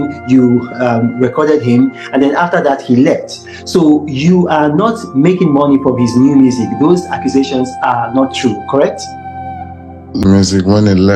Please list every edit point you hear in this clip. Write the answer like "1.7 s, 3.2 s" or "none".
10.2 s